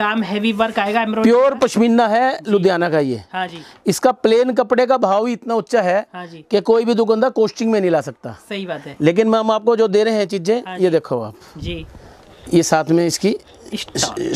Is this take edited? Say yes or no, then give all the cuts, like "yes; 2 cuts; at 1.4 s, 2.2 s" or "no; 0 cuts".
no; 0 cuts